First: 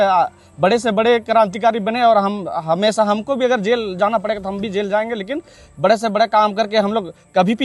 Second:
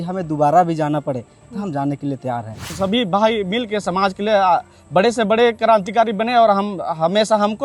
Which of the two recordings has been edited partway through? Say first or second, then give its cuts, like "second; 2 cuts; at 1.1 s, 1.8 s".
second; 1 cut; at 2.7 s